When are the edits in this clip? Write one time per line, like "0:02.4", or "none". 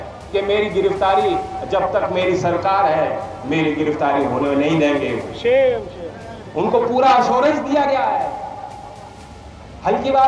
none